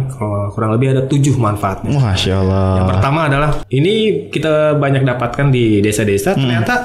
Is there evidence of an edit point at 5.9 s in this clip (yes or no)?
no